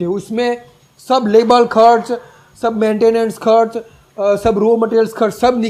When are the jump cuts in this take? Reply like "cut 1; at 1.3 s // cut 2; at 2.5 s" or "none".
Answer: none

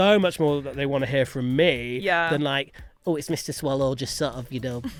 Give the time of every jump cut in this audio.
none

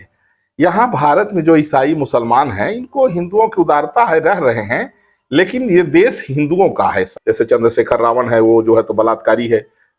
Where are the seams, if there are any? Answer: cut 1; at 7.1 s

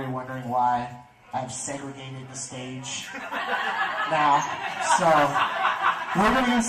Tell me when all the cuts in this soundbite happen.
cut 1; at 5.1 s

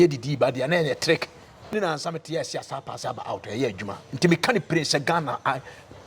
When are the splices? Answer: cut 1; at 1.7 s

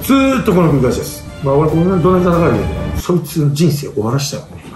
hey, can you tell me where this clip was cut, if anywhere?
none

